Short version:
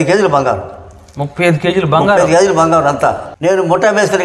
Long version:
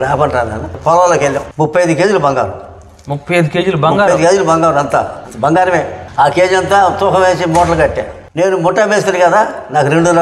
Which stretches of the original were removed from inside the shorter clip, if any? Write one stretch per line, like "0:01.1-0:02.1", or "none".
0:05.2-0:08.2

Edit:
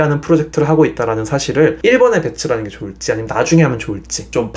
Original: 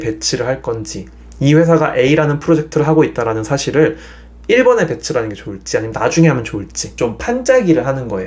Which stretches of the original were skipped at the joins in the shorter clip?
0:04.0-0:04.4

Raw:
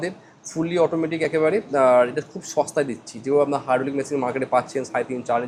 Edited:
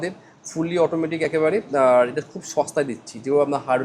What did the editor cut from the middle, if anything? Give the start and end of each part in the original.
none

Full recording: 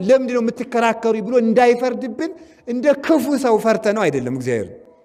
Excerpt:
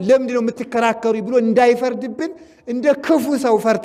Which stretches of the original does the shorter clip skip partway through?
none

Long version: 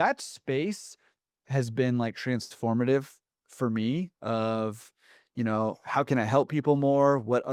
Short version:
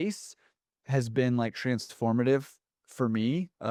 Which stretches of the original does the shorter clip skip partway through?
none

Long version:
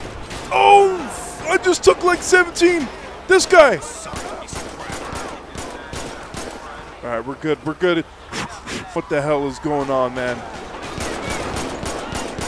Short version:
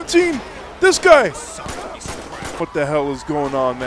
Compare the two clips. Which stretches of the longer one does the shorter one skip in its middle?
0:05.0-0:08.8

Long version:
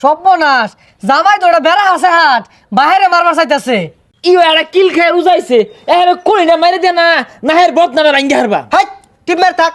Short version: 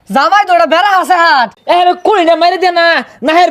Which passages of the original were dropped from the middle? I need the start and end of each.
0:02.5-0:05.8

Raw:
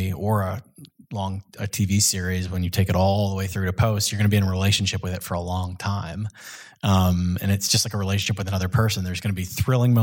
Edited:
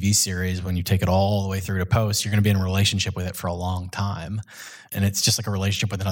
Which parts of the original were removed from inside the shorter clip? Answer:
0:06.8-0:07.4

